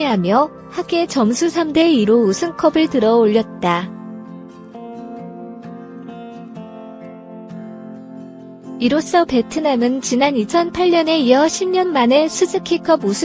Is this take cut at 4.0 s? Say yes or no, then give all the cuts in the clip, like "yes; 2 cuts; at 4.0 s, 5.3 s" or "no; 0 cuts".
yes; 3 cuts; at 2.9 s, 4.0 s, 8.8 s